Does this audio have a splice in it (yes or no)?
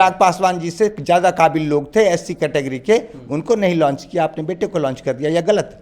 no